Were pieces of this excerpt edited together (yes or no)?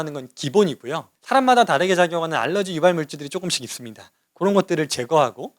yes